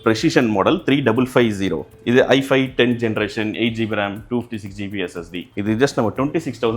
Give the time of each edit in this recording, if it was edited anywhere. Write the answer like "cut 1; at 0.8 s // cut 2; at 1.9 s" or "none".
cut 1; at 1.9 s // cut 2; at 5.4 s